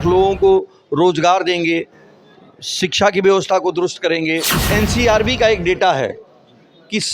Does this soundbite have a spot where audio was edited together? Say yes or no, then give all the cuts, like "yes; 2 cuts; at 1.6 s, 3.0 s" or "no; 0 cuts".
yes; 1 cut; at 4.5 s